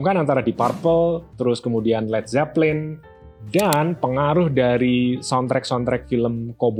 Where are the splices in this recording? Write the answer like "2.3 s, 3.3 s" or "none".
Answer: none